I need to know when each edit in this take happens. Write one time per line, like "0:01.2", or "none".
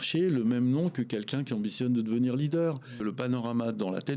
0:02.8